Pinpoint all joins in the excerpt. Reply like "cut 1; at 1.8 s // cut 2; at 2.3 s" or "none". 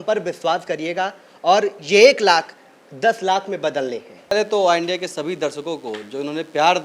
cut 1; at 4.3 s